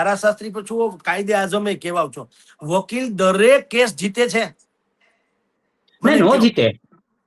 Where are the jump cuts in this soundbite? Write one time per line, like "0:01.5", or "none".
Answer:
none